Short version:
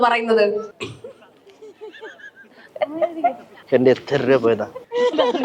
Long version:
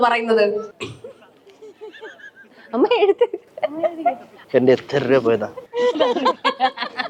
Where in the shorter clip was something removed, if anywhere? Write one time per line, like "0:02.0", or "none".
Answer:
0:02.6